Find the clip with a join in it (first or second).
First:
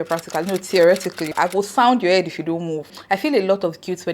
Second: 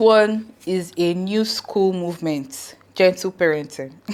first